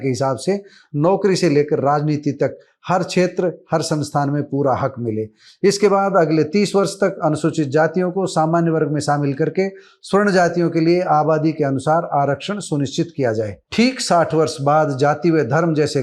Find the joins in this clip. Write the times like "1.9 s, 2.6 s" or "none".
13.6 s